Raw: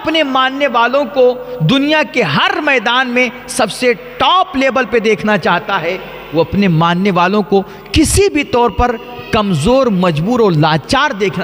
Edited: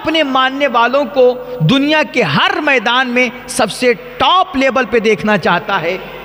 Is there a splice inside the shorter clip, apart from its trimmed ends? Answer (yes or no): no